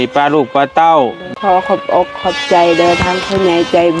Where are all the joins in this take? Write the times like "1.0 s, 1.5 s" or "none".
1.3 s

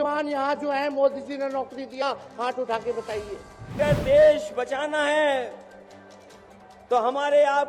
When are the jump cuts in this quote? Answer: 3.8 s

